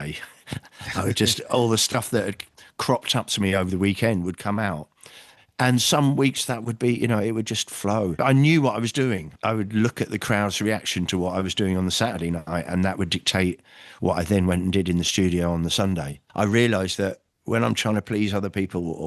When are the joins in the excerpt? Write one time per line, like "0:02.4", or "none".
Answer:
0:08.2
0:09.3
0:16.2